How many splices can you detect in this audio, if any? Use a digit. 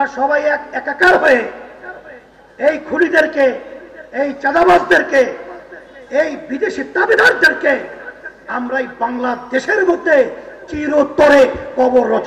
0